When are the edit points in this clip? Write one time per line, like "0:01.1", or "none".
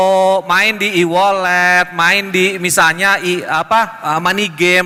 none